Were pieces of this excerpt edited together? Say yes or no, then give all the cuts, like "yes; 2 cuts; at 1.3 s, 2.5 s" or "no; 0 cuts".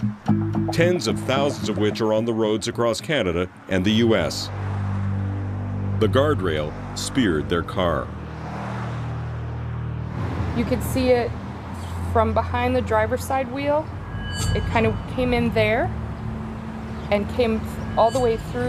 no; 0 cuts